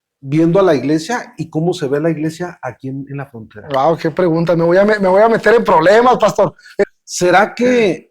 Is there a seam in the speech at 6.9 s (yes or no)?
yes